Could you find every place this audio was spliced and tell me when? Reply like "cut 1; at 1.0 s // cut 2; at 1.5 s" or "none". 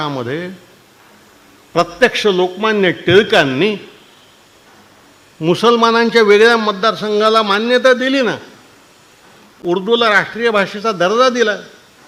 none